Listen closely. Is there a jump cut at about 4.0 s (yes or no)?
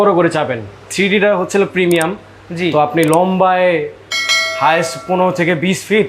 no